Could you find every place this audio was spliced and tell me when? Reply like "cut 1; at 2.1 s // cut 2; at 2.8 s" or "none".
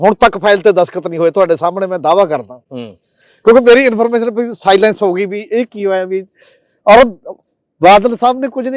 none